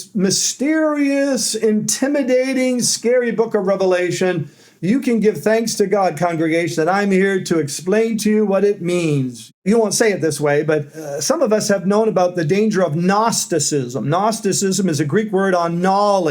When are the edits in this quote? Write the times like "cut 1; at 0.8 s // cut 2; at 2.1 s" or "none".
cut 1; at 9.6 s // cut 2; at 11.0 s